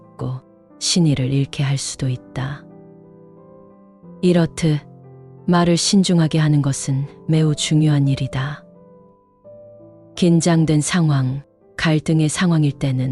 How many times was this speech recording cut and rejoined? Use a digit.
2